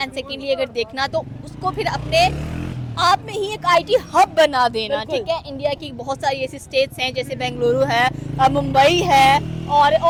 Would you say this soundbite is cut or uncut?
uncut